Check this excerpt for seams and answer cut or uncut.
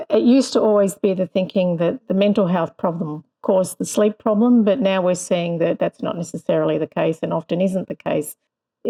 uncut